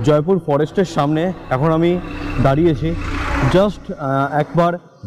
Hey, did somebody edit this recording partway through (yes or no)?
no